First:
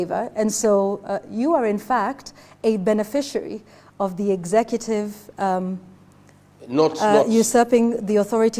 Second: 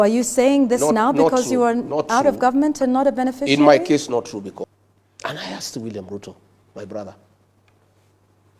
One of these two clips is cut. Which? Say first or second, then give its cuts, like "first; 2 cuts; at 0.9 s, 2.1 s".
second; 1 cut; at 4.6 s